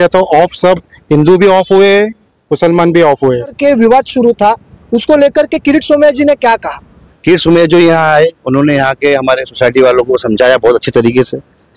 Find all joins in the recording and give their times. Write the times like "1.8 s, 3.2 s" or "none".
3.6 s, 7.1 s